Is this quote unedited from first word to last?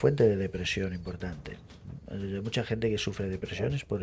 yes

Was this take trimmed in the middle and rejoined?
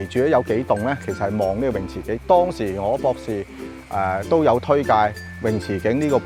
no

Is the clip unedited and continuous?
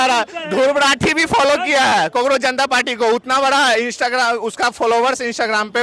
yes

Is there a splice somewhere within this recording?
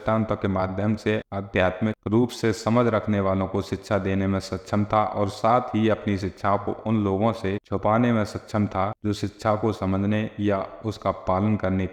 no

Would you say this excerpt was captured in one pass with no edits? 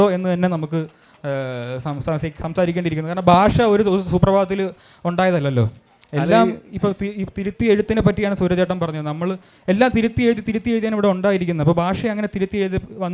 yes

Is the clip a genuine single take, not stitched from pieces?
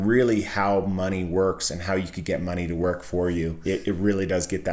no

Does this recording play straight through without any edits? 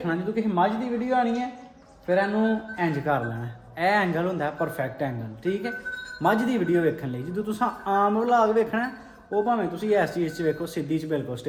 yes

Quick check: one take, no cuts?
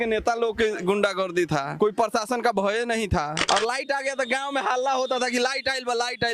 no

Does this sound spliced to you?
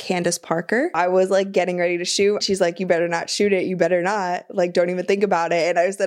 yes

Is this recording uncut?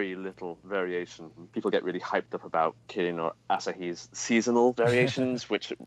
no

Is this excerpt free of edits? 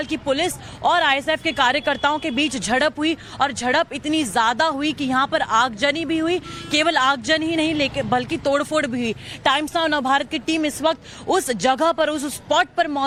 yes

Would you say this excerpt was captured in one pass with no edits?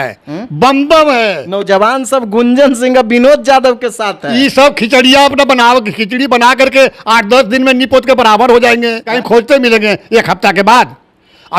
no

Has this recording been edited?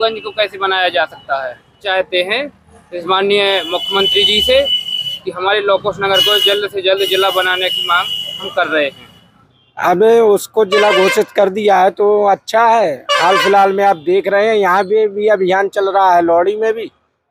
no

